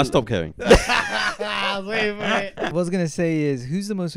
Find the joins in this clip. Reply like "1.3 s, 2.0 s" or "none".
2.7 s